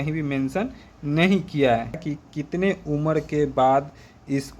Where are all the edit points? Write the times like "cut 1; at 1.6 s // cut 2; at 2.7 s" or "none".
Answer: cut 1; at 2.0 s